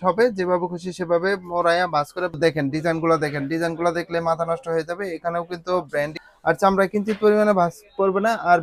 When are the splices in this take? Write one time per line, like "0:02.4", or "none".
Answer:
0:02.3
0:06.2